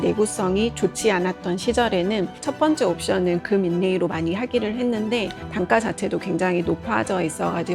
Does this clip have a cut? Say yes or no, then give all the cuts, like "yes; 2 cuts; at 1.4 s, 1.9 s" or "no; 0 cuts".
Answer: yes; 1 cut; at 5.4 s